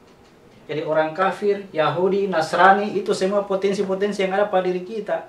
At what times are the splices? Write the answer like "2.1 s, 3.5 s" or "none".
none